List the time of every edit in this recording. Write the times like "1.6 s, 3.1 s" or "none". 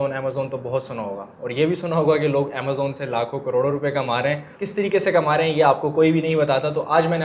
4.6 s

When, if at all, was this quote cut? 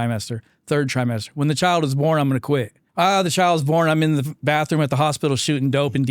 2.8 s

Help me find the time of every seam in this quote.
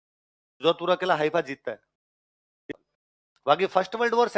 2.7 s

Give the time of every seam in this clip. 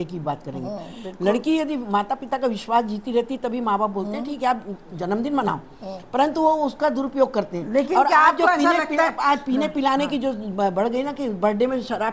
none

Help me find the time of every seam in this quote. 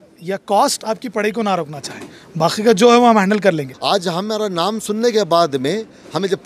3.7 s

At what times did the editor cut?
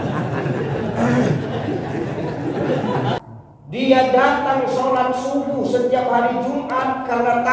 3.2 s

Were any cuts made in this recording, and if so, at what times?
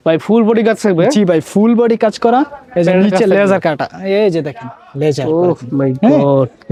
none

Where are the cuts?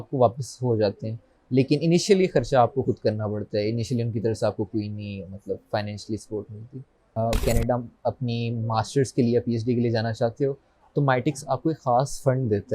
7.2 s

